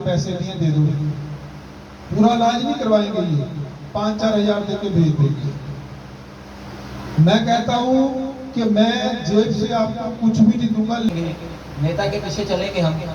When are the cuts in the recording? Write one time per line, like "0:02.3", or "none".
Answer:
0:11.1